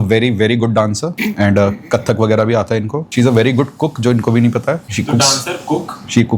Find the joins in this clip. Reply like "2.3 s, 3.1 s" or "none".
1.1 s, 3.0 s, 4.9 s